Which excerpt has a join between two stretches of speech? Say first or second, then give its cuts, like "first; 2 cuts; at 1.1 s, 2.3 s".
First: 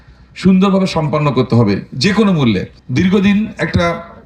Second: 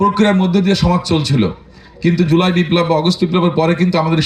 first; 1 cut; at 2.8 s